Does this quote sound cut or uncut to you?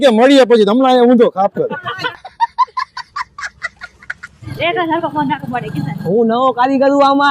cut